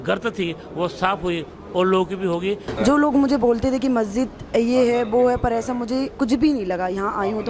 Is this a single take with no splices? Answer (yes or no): no